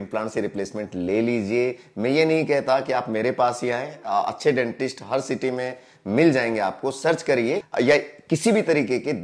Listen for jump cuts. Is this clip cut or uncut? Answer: cut